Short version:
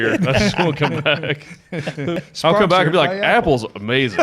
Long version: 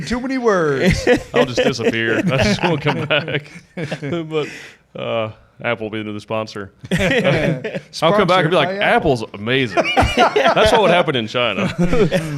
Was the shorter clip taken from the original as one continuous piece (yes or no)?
no